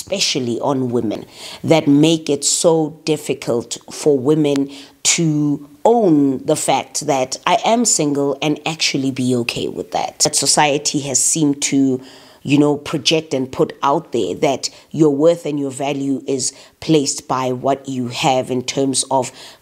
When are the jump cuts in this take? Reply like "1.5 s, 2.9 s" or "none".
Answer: 1.3 s, 10.1 s